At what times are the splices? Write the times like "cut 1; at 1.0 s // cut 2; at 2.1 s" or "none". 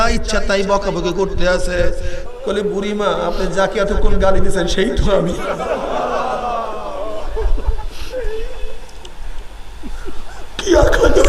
cut 1; at 2.1 s